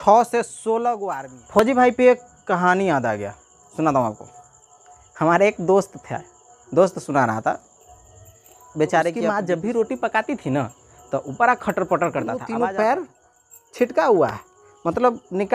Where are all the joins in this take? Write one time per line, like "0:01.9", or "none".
0:01.6
0:09.3
0:12.4